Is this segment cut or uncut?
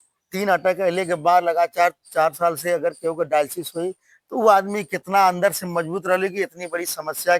uncut